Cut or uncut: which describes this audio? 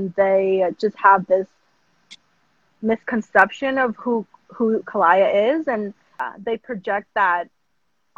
cut